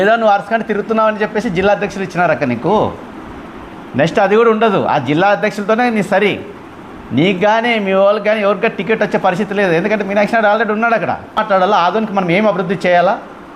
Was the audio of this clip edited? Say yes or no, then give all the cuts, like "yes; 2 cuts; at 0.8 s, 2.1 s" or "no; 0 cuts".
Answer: yes; 1 cut; at 11.4 s